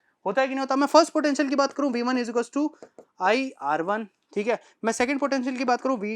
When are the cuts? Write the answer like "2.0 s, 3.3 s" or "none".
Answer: none